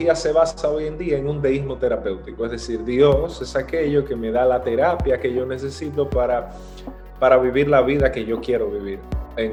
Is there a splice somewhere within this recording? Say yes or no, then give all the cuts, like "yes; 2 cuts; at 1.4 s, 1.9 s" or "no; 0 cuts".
no; 0 cuts